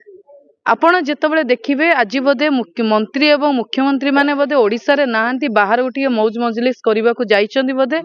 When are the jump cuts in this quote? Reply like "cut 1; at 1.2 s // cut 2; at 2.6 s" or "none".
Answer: none